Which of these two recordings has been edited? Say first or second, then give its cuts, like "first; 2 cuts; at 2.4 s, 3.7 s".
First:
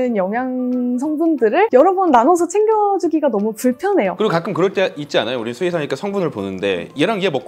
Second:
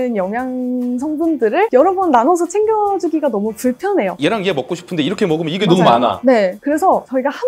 second; 1 cut; at 4.1 s